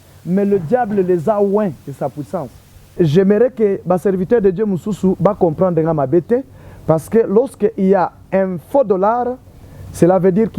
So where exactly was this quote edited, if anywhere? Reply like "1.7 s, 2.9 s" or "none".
2.9 s